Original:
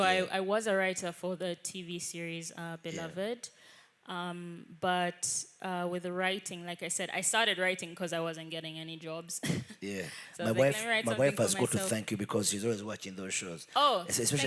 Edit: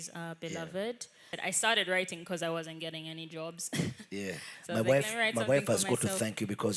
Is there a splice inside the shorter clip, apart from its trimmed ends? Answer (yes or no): yes